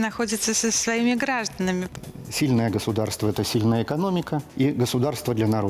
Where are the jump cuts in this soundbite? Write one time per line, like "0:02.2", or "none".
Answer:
0:01.9
0:04.5